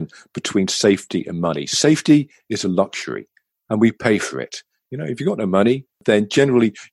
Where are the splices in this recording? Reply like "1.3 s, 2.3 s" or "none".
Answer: 6.0 s